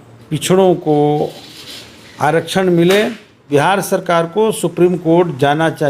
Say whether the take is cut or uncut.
cut